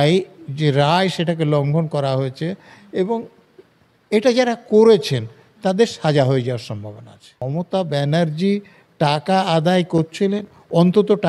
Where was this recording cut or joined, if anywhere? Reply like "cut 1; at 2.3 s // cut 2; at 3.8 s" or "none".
cut 1; at 7.4 s